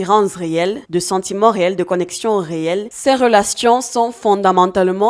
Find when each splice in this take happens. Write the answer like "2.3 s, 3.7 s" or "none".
2.9 s